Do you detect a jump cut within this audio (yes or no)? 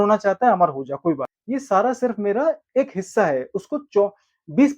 yes